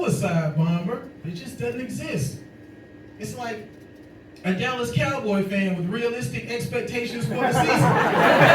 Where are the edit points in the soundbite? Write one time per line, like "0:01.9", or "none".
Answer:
0:01.2